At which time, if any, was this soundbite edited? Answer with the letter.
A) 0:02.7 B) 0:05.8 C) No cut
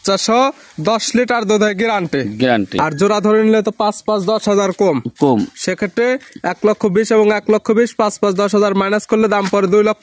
A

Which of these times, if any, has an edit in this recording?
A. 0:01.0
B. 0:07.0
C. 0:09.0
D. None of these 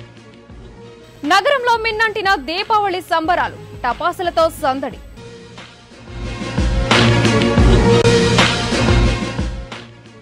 A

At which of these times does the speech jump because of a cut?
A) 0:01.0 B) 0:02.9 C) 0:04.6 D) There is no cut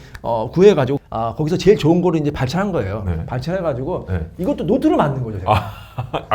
A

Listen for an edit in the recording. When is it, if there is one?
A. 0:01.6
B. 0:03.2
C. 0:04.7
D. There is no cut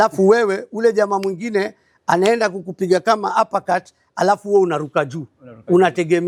D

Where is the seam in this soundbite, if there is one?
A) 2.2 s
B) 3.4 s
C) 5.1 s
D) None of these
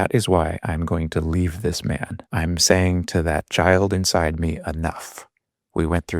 A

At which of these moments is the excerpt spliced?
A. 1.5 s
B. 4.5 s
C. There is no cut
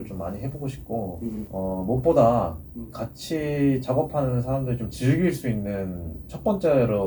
A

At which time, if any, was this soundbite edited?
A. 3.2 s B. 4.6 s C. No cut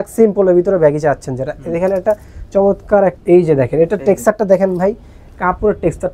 A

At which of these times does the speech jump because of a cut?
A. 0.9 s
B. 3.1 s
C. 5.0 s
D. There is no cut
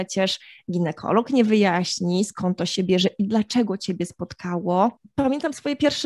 C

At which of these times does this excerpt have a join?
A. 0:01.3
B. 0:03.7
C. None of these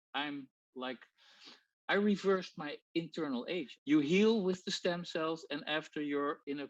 B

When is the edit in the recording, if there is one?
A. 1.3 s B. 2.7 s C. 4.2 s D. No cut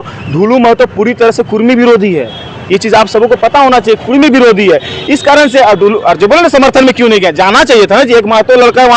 D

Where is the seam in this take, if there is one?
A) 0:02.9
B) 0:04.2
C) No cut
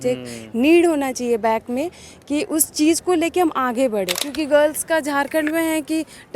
B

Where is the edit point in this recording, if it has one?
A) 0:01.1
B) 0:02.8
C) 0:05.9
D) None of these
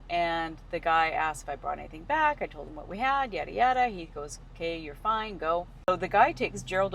C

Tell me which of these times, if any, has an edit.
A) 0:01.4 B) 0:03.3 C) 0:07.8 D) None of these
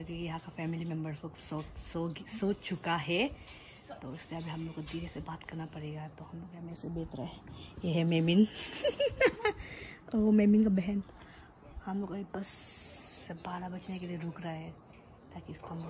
A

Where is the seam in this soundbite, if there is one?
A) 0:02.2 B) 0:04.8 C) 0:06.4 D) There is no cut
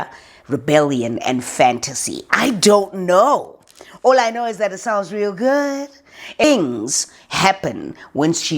C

